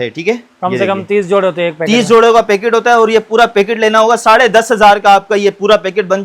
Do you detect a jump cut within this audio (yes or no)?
no